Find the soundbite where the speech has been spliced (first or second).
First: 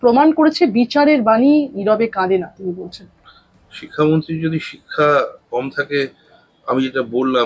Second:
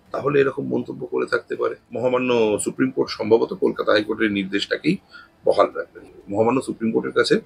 second